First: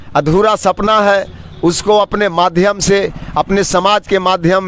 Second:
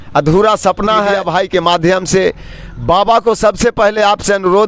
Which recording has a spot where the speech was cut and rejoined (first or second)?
second